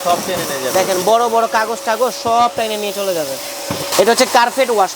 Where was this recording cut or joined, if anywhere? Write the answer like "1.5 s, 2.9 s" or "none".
3.9 s